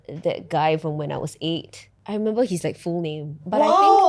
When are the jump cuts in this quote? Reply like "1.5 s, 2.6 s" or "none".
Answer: 1.9 s